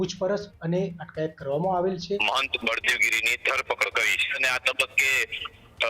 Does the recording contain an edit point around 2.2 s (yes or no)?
yes